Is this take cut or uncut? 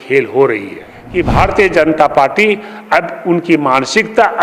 cut